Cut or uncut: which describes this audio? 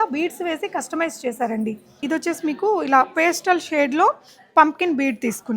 cut